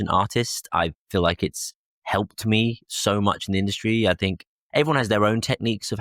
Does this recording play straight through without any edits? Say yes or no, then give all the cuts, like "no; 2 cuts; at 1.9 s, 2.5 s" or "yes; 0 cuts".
yes; 0 cuts